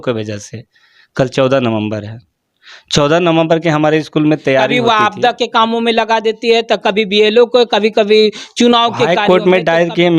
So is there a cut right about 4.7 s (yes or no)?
yes